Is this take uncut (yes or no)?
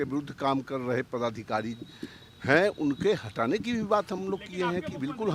yes